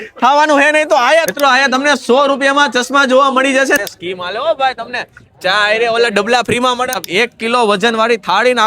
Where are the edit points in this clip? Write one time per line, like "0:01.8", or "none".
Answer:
0:01.3
0:03.8
0:07.0